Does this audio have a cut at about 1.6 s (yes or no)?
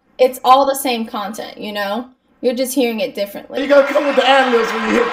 no